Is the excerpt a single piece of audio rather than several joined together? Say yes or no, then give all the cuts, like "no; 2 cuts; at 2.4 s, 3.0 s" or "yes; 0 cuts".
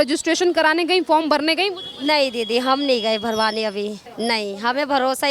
no; 1 cut; at 4.0 s